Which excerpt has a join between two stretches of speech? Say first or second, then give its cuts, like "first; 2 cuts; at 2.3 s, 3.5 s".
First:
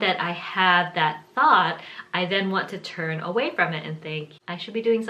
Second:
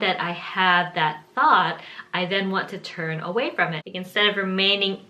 second; 1 cut; at 3.8 s